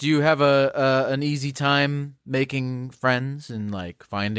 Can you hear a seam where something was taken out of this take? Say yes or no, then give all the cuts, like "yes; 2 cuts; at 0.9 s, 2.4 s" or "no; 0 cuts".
no; 0 cuts